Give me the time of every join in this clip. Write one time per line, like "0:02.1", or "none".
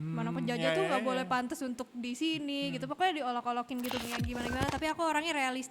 0:04.0